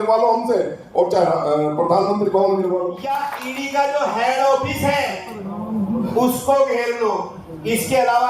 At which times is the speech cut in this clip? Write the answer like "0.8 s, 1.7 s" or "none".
3.3 s